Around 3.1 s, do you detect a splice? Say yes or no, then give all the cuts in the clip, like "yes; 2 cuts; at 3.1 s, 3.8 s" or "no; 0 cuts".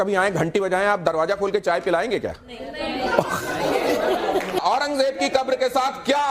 no; 1 cut; at 4.6 s